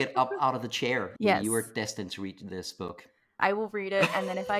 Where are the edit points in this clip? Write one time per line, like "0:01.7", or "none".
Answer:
0:01.1
0:03.3